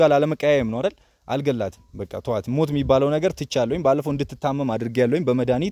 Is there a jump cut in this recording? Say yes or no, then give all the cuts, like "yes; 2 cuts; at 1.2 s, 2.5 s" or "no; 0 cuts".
no; 0 cuts